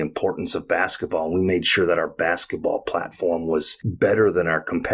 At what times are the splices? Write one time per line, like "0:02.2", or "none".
0:03.8